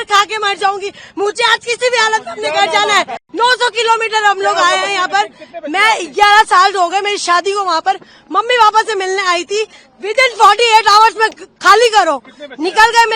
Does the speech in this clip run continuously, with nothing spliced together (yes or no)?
no